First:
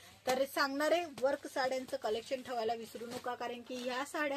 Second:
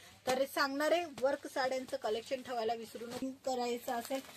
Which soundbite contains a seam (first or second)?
second